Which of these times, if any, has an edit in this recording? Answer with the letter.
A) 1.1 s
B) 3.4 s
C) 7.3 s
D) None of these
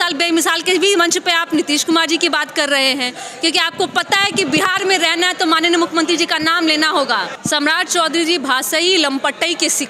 C